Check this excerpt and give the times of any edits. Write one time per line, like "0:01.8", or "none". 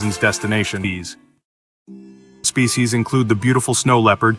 0:00.8
0:02.5